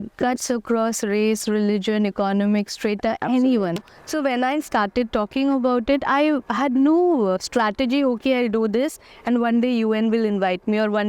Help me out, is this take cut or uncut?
cut